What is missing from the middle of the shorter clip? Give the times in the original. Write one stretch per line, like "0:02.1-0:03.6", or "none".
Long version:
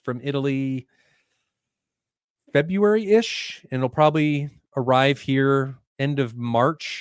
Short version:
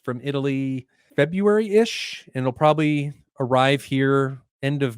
0:01.0-0:02.3